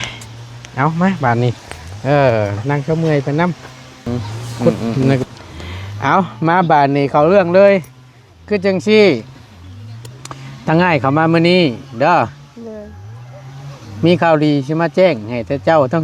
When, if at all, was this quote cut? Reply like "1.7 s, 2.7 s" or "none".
5.2 s